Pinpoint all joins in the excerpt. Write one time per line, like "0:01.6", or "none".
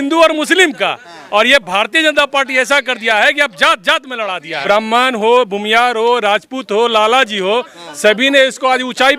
0:04.6